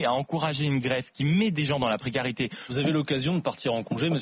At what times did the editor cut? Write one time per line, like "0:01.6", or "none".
0:02.6